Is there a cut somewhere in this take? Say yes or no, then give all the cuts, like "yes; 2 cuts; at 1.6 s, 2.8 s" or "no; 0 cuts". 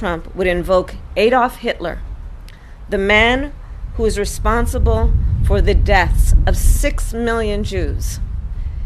no; 0 cuts